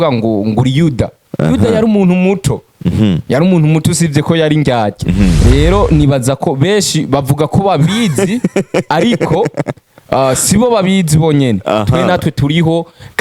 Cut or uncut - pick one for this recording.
uncut